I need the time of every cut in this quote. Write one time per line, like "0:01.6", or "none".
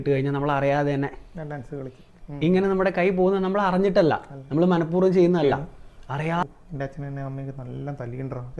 0:06.4